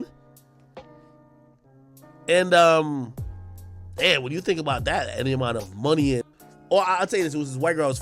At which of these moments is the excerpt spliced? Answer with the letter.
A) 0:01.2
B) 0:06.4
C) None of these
B